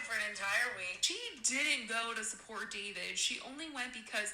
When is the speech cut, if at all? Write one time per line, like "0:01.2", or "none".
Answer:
0:01.0